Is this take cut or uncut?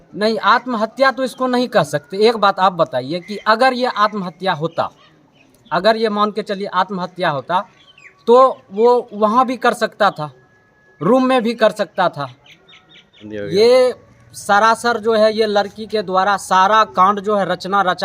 cut